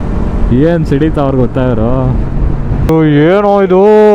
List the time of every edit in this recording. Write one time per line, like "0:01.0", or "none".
0:02.9